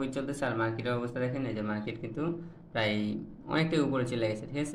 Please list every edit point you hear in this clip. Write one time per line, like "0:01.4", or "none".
none